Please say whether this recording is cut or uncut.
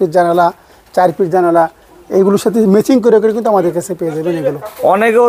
uncut